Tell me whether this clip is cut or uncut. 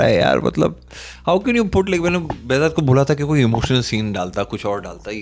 uncut